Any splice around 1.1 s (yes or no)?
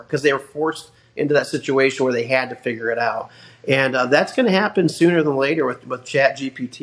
no